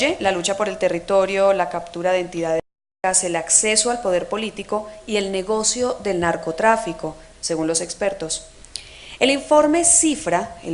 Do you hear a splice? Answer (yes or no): yes